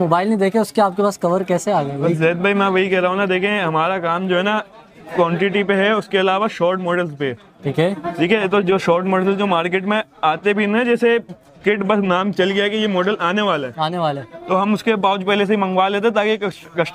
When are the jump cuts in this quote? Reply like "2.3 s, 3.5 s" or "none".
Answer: none